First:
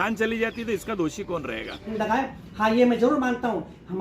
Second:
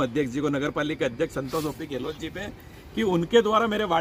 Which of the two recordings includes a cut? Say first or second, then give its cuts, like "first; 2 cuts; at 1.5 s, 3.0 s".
first; 1 cut; at 1.9 s